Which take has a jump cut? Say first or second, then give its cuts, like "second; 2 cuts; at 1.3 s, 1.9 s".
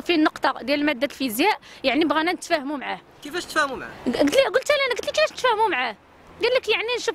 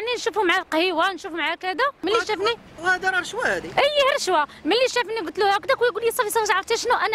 second; 1 cut; at 2.0 s